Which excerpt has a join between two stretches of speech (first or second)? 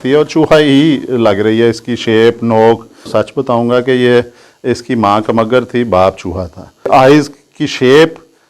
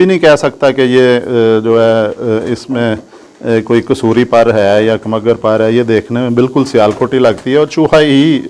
first